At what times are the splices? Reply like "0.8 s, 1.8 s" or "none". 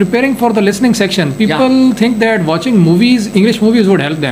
none